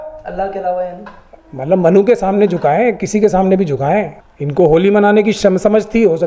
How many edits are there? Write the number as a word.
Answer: one